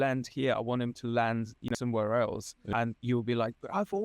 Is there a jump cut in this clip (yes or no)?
yes